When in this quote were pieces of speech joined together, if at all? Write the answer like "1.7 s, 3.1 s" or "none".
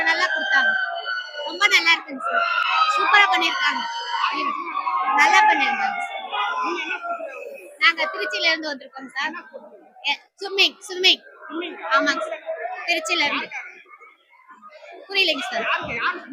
none